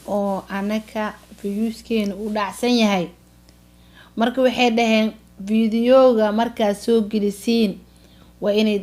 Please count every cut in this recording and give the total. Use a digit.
0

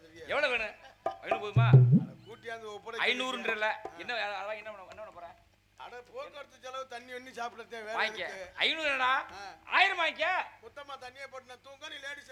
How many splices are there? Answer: 0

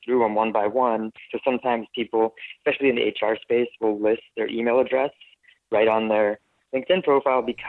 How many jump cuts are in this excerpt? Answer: 1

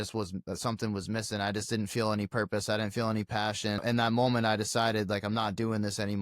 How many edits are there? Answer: 1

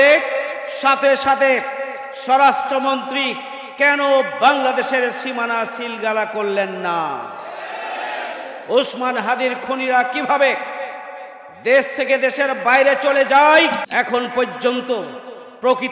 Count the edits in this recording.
1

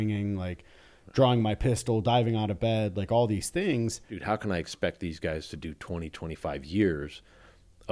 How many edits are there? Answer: 1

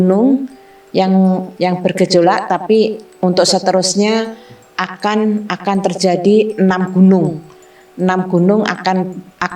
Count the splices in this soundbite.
1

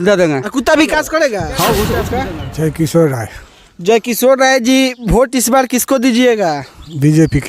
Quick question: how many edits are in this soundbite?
1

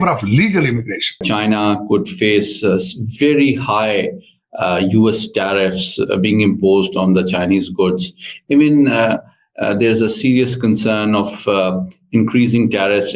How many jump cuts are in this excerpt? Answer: 1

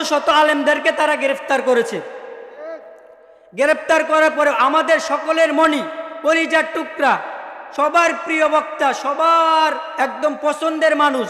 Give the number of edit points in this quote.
1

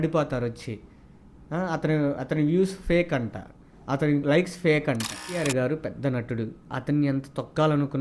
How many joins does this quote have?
1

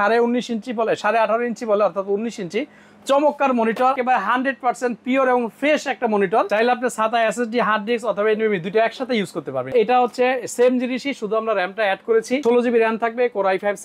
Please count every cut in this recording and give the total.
4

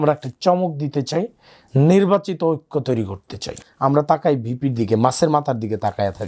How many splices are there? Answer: 1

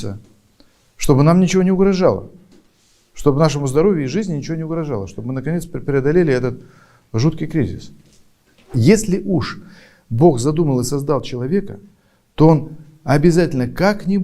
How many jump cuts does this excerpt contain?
1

